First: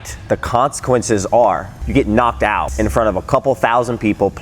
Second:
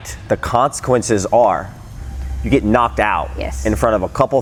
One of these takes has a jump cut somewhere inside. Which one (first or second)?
first